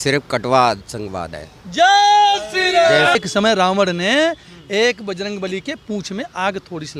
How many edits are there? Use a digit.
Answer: 1